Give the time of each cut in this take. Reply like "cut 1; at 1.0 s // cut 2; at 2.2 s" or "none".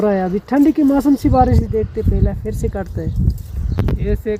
none